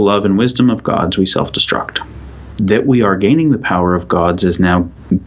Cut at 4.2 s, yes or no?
no